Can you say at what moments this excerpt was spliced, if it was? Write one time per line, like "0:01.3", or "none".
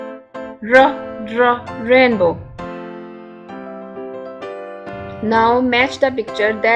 none